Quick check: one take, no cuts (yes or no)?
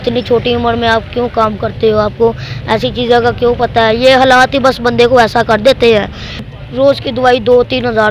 no